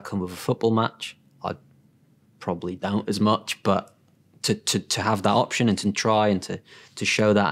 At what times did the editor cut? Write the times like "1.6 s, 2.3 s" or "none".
none